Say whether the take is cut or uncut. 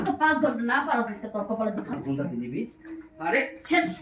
cut